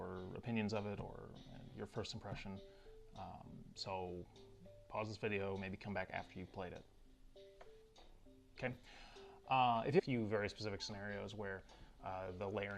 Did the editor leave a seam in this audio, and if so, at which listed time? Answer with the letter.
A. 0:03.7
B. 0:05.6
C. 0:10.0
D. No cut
D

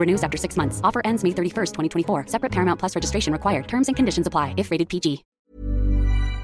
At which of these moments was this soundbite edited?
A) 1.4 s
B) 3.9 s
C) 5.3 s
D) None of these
C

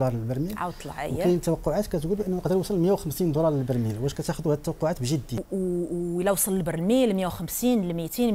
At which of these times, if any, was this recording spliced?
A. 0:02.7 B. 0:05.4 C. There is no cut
B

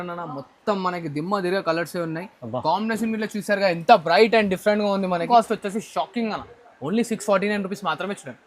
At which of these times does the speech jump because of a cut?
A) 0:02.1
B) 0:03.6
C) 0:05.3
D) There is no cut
C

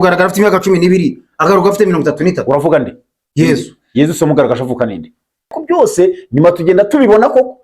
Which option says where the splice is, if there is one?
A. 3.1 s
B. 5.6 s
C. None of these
B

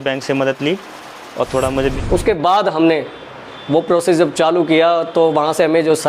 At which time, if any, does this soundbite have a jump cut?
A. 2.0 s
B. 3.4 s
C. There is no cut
A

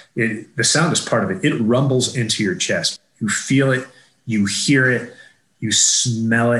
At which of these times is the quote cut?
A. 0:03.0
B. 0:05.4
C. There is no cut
A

